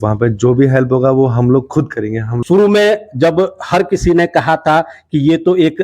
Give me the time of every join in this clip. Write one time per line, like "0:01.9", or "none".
0:02.3